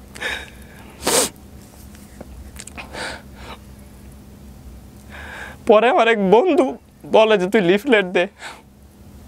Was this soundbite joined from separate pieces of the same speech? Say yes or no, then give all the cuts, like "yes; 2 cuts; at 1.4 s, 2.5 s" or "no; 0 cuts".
no; 0 cuts